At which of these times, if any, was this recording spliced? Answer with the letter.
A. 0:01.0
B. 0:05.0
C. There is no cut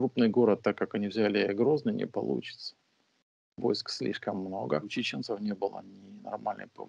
B